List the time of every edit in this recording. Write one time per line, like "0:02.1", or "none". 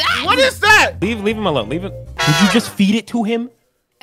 0:00.9